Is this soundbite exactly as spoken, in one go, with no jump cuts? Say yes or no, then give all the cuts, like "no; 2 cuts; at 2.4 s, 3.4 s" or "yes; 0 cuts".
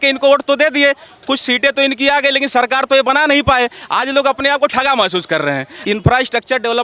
no; 1 cut; at 5.7 s